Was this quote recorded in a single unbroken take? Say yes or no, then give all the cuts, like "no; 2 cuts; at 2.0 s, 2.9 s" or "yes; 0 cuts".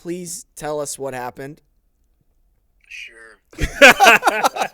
no; 1 cut; at 1.7 s